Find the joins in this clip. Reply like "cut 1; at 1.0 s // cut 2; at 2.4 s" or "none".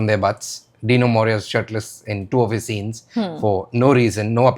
none